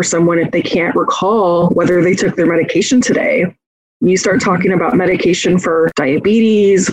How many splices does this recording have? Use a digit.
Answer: 2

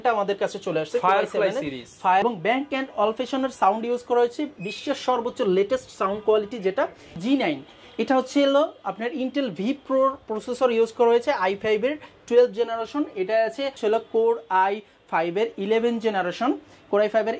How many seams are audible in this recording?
3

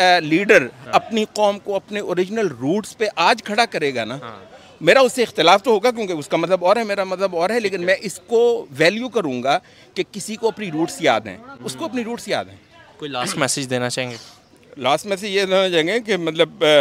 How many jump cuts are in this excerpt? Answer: 0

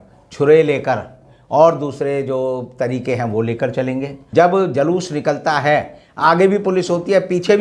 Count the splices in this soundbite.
1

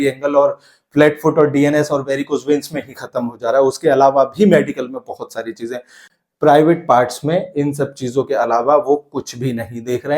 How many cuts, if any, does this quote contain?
1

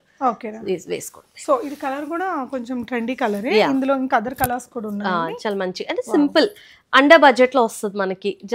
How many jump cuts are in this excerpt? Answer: 0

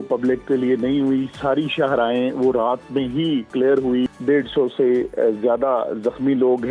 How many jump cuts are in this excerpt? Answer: 1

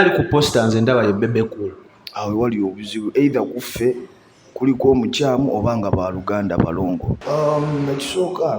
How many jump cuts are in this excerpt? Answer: 1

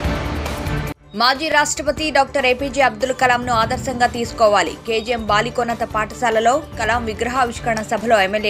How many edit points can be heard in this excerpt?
1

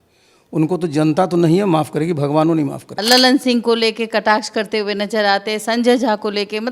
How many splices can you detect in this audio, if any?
1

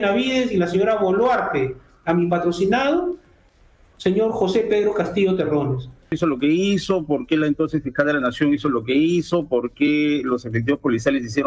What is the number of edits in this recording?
1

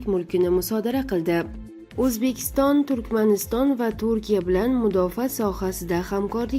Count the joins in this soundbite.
1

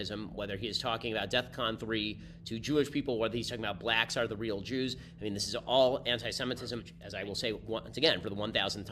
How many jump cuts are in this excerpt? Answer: 1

